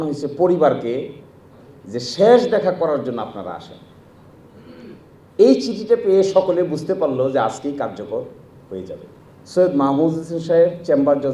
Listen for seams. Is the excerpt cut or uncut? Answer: cut